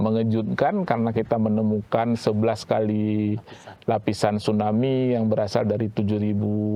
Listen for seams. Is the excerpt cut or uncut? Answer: uncut